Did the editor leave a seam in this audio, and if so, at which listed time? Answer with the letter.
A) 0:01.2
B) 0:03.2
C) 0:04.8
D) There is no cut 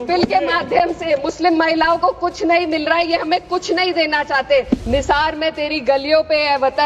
C